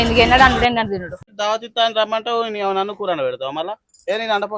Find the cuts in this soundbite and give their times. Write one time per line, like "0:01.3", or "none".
0:01.2